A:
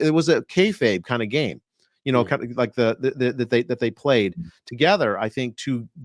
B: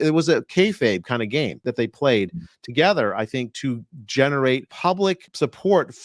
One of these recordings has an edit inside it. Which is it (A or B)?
B